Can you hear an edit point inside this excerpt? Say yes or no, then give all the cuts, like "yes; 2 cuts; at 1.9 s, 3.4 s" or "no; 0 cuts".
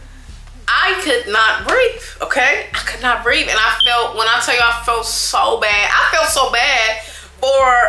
no; 0 cuts